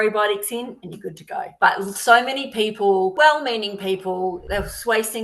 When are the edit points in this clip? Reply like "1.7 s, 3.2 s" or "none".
1.5 s, 3.1 s, 4.4 s